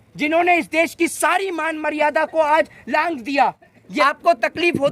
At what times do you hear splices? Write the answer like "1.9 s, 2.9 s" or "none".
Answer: 3.8 s